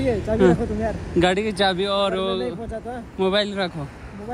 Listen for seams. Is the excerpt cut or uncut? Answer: uncut